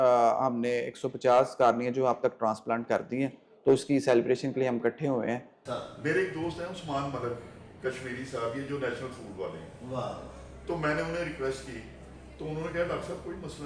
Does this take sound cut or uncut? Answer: cut